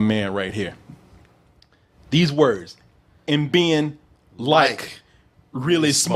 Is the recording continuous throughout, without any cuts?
yes; 0 cuts

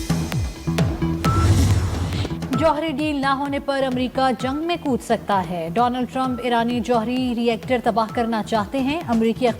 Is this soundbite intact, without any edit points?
no; 1 cut; at 1.2 s

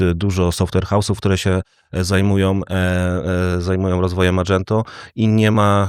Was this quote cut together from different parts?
no; 0 cuts

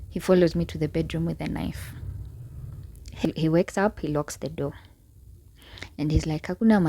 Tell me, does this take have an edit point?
yes; 1 cut; at 3.2 s

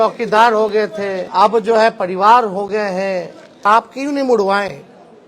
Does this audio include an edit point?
yes; 2 cuts; at 1.2 s, 3.5 s

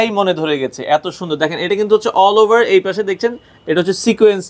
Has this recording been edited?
no; 0 cuts

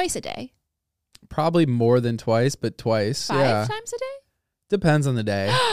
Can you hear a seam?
no; 0 cuts

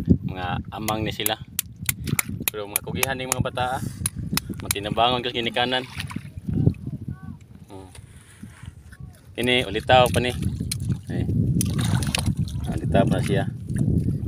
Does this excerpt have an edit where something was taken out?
no; 0 cuts

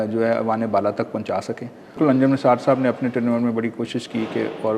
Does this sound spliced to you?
yes; 1 cut; at 2.0 s

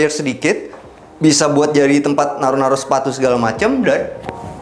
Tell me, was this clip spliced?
no; 0 cuts

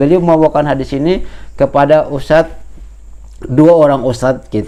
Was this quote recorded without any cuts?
yes; 0 cuts

